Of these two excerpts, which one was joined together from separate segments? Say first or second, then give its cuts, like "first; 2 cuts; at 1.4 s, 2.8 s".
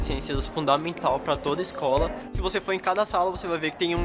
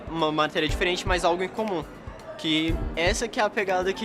first; 1 cut; at 2.2 s